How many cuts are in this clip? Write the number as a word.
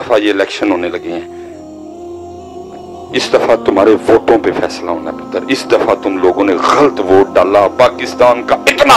zero